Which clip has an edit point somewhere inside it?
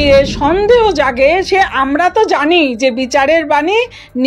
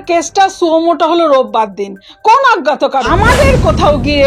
second; 1 cut; at 3.1 s

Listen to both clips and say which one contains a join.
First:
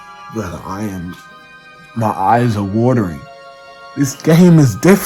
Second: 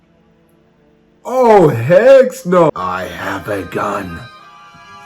second; 1 cut; at 2.7 s

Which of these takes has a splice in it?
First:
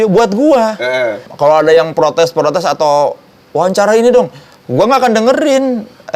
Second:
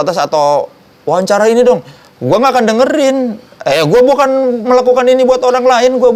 first; 1 cut; at 1.2 s

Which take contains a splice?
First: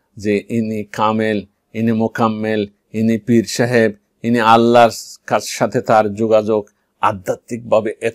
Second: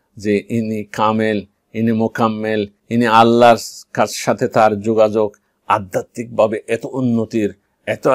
second; 1 cut; at 2.8 s

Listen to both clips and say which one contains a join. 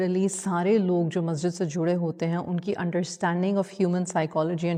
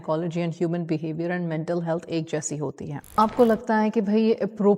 second; 1 cut; at 3.2 s

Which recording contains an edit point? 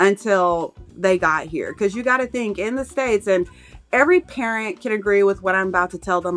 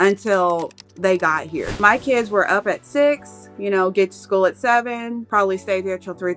second; 2 cuts; at 1.7 s, 5.2 s

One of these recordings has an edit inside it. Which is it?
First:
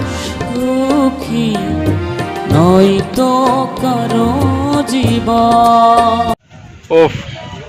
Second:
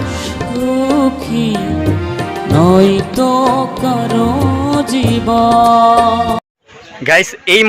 second; 1 cut; at 6.7 s

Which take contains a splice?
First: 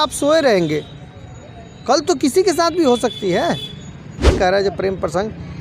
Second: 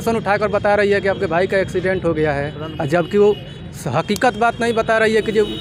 first; 1 cut; at 4.4 s

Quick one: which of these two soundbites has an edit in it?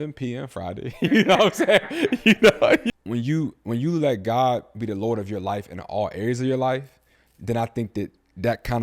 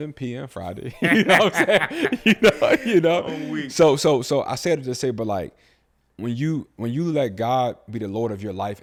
first; 1 cut; at 2.9 s

